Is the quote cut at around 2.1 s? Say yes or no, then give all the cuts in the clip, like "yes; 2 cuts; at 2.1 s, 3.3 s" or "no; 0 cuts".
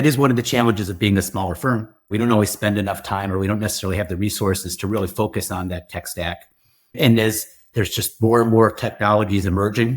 yes; 1 cut; at 2.1 s